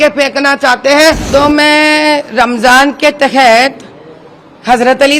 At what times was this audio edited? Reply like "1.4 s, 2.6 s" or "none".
1.2 s